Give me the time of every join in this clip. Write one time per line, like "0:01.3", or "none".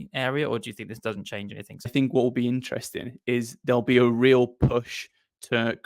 0:01.9

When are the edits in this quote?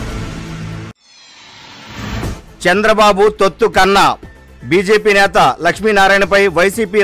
0:00.8
0:02.2

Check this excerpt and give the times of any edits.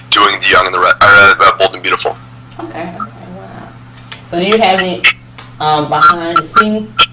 none

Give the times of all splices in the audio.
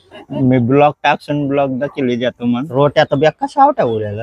0:02.7

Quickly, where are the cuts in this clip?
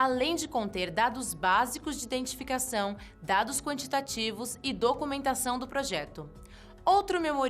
0:03.8

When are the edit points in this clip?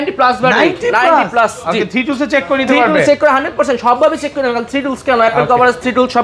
none

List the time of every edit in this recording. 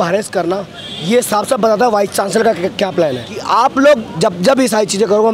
0:03.3

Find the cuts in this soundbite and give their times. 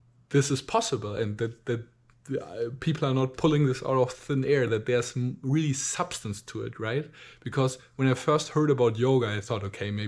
none

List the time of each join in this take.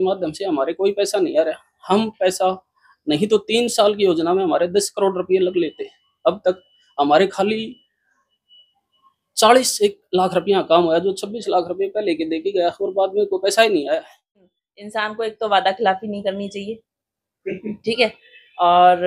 0:14.4

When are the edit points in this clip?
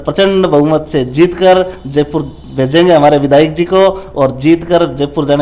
none

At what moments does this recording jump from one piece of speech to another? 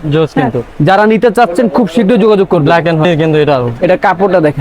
0:03.0

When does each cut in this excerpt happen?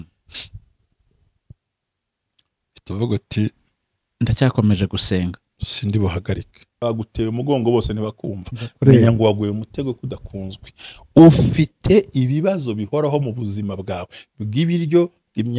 0:06.8

